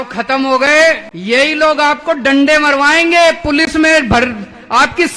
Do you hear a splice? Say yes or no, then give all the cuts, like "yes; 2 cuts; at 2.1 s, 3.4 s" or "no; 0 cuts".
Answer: yes; 1 cut; at 1.1 s